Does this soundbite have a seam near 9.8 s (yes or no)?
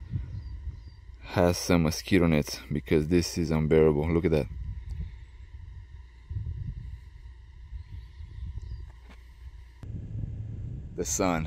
yes